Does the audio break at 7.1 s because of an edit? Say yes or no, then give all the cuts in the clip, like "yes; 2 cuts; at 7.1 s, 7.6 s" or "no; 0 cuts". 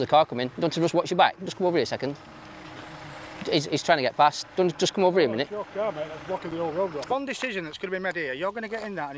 yes; 1 cut; at 7.1 s